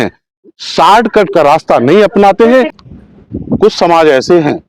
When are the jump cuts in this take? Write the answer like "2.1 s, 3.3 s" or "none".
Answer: 2.7 s

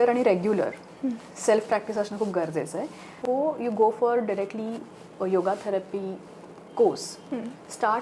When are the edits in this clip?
3.2 s

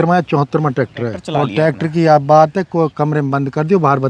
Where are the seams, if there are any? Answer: 1.2 s

